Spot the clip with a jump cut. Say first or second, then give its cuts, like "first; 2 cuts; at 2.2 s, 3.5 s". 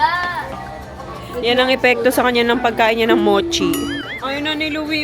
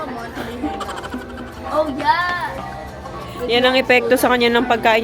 first; 1 cut; at 4.0 s